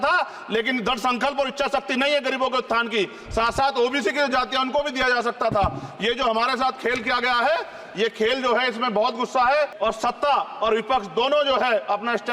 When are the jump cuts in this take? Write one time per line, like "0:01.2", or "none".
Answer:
0:09.7

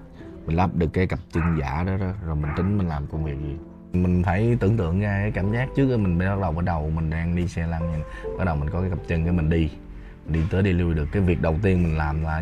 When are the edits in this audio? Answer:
0:03.9

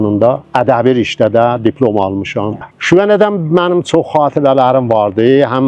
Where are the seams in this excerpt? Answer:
0:02.7

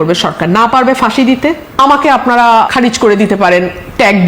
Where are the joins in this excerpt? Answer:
0:01.6
0:02.7

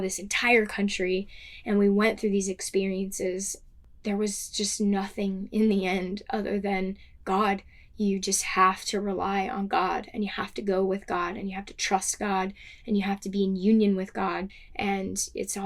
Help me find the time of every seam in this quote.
0:14.5

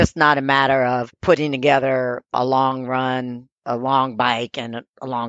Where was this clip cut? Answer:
0:01.1
0:02.3
0:03.6

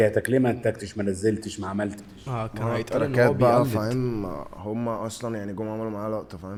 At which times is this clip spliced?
none

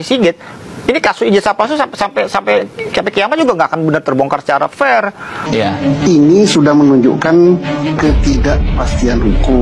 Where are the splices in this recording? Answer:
0:05.4

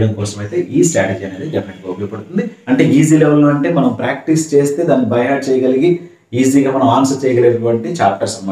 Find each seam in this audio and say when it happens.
0:02.6

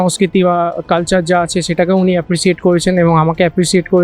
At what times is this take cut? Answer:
none

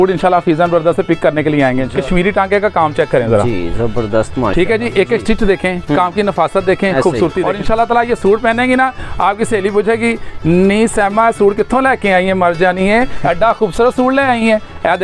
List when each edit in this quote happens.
0:01.9
0:07.4

